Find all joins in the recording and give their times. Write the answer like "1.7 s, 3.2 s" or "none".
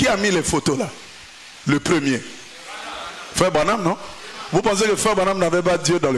none